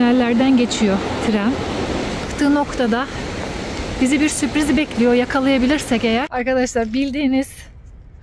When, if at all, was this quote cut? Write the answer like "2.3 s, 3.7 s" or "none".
2.3 s, 6.3 s